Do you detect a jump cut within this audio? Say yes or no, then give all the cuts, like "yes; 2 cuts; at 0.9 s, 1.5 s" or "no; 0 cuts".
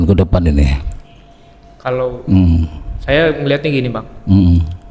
no; 0 cuts